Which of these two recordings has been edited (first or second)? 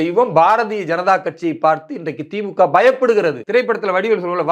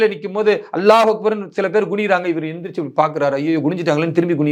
first